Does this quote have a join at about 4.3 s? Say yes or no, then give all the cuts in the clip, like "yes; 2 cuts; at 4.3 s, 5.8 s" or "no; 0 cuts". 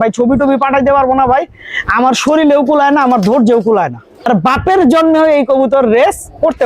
yes; 1 cut; at 4.3 s